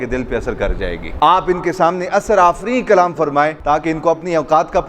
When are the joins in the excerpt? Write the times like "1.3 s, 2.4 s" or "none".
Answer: 1.1 s, 3.6 s